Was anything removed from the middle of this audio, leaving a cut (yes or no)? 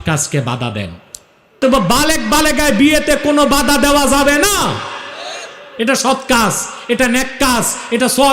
yes